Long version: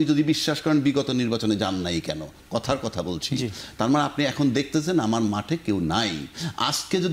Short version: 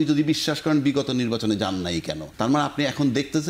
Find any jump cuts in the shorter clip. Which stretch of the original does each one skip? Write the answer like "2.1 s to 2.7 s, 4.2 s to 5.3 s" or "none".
2.2 s to 3.6 s

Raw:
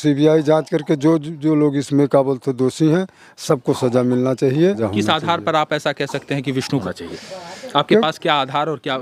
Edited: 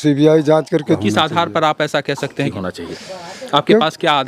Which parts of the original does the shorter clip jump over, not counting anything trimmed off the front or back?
1.0 s to 4.9 s, 6.5 s to 6.8 s

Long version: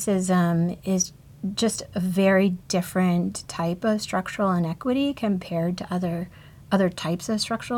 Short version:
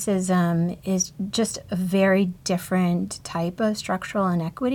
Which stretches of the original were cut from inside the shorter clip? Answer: 1.2 s to 1.4 s

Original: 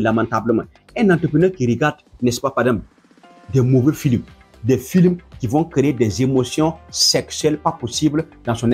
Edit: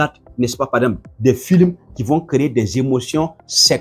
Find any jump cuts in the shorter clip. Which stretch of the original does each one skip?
2.9 s to 4.5 s

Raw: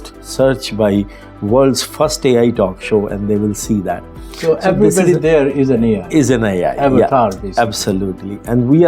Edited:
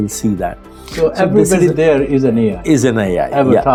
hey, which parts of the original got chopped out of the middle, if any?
none

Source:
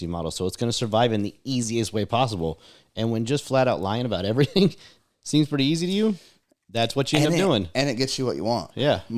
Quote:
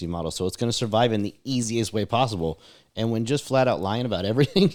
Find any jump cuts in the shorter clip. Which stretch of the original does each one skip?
none

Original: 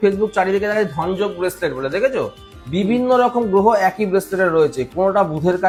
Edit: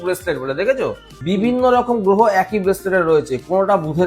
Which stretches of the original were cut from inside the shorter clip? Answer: 2.4 s to 2.5 s

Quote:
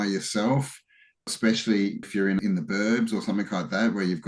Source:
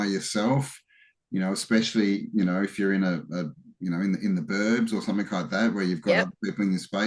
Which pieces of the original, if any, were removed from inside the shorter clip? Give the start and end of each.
1.3 s to 1.6 s, 2.6 s to 4.1 s

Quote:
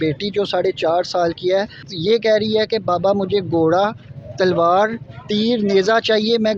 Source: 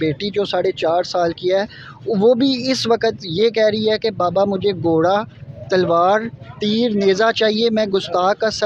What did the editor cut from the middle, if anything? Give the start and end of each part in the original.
1.9 s to 3.2 s

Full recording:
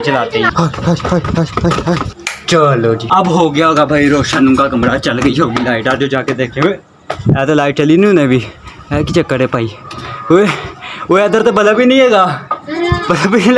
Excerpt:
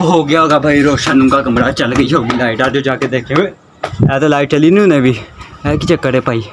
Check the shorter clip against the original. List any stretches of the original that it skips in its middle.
none

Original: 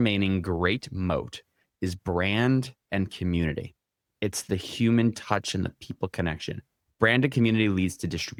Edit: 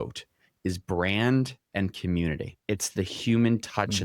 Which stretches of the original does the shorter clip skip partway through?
3.7 s to 4.0 s

